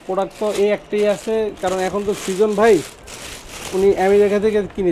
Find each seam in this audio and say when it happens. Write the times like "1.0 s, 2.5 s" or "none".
none